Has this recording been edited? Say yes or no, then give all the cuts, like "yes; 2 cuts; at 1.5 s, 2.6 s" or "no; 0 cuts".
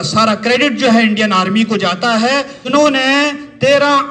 yes; 1 cut; at 2.7 s